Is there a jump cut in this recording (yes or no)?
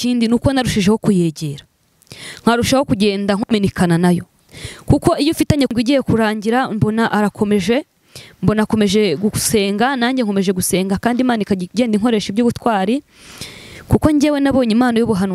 yes